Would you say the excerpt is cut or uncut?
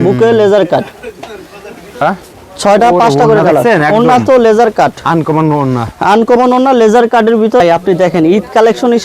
cut